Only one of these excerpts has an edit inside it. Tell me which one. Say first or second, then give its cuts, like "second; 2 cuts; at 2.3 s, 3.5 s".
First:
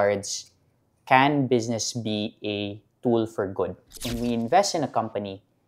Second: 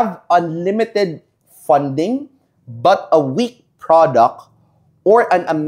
first; 1 cut; at 4.0 s